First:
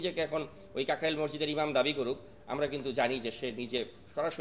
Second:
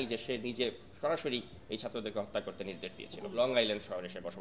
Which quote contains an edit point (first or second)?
second